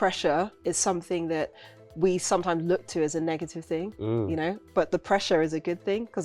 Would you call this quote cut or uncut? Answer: uncut